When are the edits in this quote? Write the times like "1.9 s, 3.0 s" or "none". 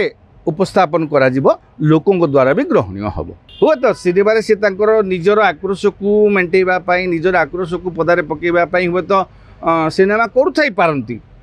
3.5 s